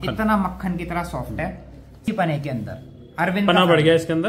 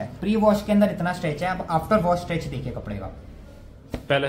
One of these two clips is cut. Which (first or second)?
first